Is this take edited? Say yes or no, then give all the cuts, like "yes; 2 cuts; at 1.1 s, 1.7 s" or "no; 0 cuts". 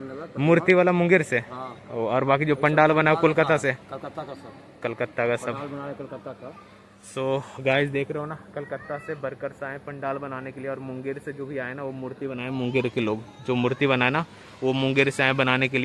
no; 0 cuts